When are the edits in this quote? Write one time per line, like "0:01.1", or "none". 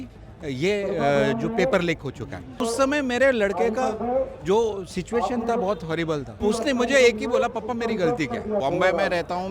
0:02.6
0:06.3
0:08.6